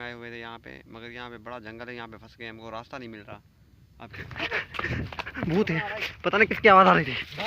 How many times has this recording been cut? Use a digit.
1